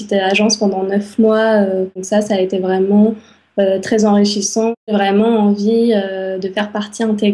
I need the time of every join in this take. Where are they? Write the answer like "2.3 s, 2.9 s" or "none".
2.0 s, 4.9 s